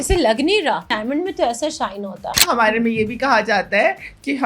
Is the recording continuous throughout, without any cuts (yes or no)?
no